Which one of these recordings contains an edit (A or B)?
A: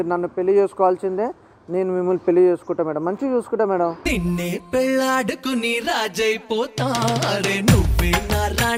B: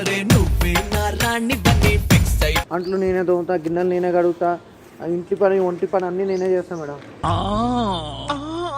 B